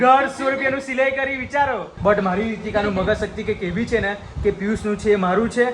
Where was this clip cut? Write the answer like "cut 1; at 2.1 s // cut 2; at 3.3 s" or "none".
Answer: cut 1; at 1.9 s